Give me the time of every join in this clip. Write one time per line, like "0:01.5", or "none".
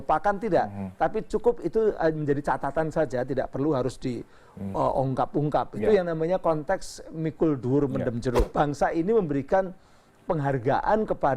0:08.5